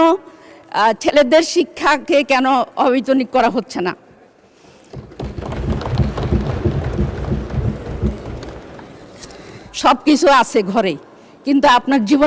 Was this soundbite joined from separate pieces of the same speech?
yes; 1 cut; at 9.6 s

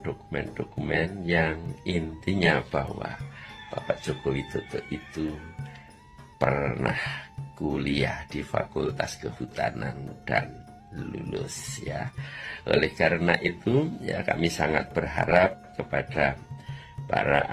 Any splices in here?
no; 0 cuts

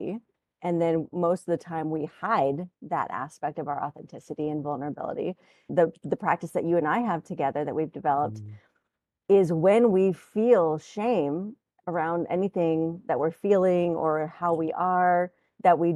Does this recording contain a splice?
no; 0 cuts

